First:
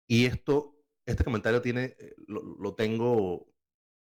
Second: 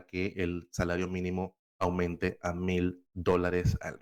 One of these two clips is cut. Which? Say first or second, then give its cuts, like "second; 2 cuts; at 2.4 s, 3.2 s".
second; 2 cuts; at 1.6 s, 3.1 s